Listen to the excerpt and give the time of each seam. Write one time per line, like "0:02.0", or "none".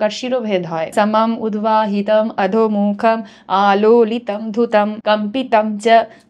0:00.9
0:05.0